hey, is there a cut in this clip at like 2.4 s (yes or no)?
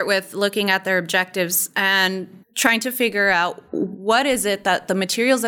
yes